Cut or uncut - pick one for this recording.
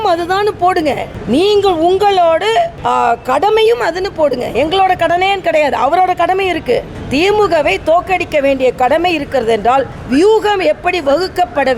uncut